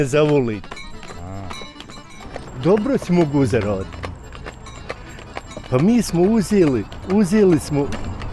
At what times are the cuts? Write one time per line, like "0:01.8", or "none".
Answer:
0:02.2